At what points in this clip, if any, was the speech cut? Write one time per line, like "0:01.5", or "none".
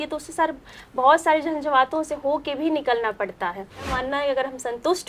0:03.9